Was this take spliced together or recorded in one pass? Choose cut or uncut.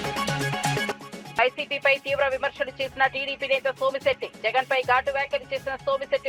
uncut